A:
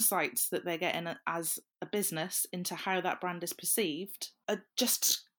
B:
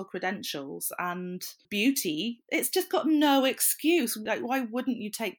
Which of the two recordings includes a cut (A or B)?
B